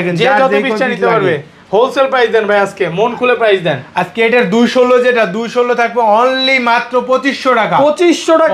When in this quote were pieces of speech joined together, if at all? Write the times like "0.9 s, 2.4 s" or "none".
none